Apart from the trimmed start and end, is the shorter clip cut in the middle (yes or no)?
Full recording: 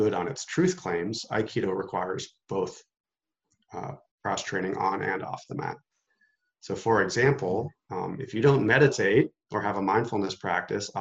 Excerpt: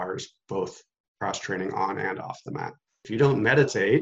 yes